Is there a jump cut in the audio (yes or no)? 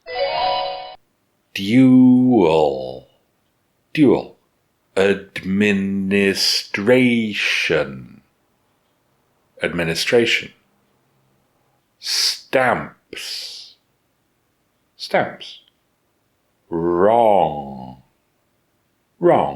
yes